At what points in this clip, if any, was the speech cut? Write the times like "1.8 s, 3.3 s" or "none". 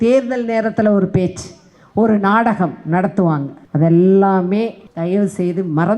3.6 s, 4.8 s